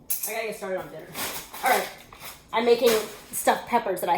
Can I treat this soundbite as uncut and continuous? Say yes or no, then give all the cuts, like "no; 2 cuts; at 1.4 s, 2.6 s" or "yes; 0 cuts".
yes; 0 cuts